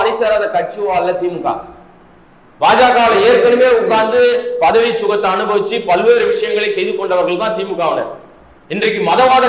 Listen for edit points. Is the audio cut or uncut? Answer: uncut